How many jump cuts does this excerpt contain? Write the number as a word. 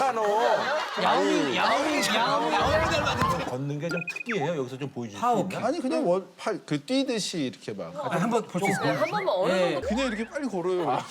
two